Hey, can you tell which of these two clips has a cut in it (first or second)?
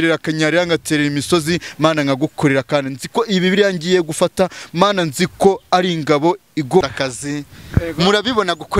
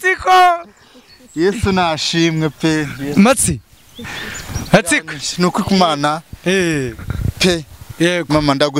first